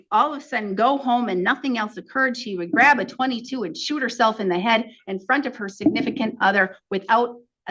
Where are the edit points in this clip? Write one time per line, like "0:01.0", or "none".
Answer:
none